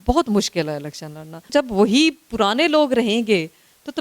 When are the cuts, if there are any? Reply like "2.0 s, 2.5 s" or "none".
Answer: 1.4 s